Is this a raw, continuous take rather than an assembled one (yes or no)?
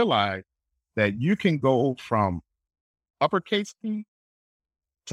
yes